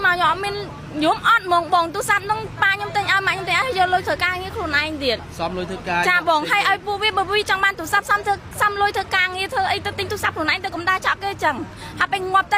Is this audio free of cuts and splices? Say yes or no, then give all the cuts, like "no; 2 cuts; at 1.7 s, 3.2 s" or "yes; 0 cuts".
yes; 0 cuts